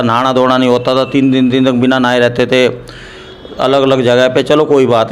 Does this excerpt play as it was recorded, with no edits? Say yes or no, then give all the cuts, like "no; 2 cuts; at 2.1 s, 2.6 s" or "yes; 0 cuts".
yes; 0 cuts